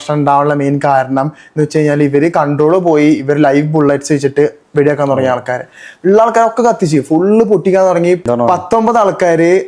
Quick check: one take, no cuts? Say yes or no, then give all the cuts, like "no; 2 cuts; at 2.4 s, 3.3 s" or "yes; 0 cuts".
yes; 0 cuts